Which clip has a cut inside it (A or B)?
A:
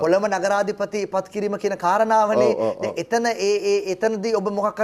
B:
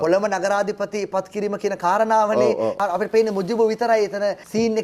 B